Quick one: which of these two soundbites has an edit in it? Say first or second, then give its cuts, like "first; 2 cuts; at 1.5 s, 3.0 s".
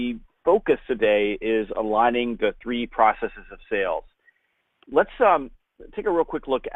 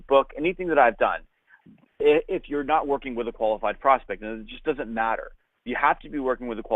second; 1 cut; at 3.3 s